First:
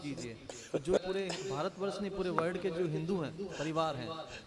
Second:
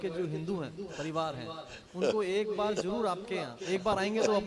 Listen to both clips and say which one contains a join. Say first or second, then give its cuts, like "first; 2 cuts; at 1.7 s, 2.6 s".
first; 1 cut; at 1.0 s